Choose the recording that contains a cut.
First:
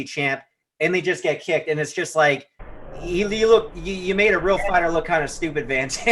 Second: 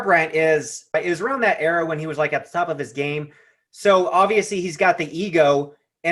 second; 1 cut; at 0.9 s

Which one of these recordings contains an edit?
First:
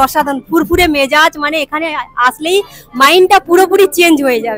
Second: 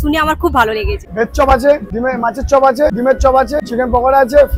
second; 4 cuts; at 1.0 s, 1.9 s, 3.0 s, 3.6 s

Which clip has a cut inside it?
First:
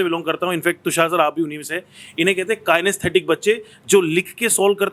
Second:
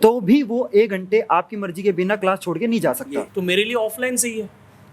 second; 1 cut; at 3.3 s

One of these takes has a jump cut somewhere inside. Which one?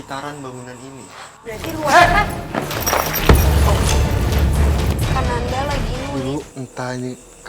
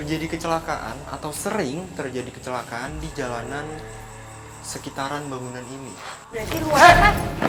first; 1 cut; at 6.1 s

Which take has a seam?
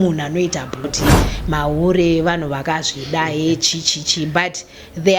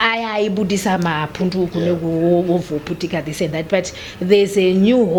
first; 1 cut; at 0.9 s

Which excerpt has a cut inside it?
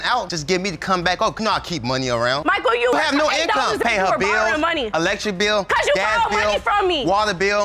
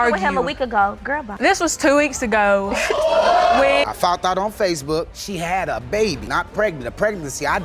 second; 1 cut; at 3.8 s

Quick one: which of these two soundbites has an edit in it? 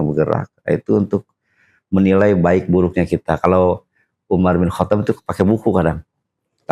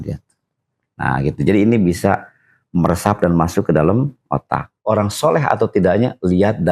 second; 1 cut; at 4.8 s

